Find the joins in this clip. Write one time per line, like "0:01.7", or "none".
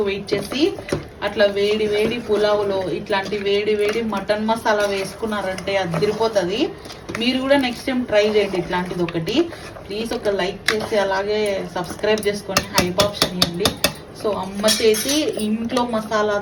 none